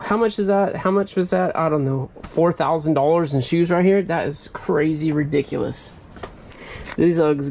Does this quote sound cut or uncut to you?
cut